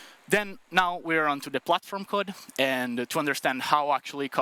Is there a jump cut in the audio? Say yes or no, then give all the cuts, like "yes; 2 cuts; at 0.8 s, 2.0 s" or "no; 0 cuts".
no; 0 cuts